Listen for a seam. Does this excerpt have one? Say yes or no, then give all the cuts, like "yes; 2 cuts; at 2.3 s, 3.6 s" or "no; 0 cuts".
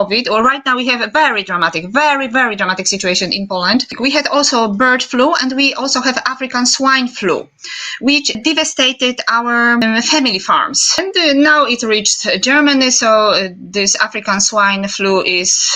yes; 4 cuts; at 4.0 s, 8.4 s, 9.8 s, 10.9 s